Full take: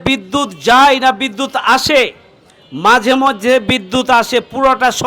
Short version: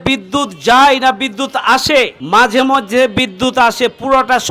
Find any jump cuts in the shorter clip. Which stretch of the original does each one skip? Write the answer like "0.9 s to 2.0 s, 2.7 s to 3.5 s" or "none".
2.2 s to 2.7 s